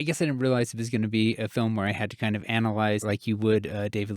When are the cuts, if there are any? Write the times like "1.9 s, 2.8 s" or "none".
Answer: 3.0 s